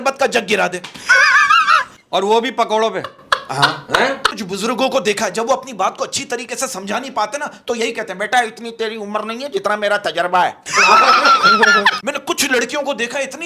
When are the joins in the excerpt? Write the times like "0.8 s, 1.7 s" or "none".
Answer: 4.3 s, 12.0 s